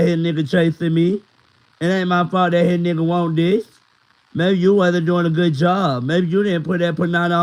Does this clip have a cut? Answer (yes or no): no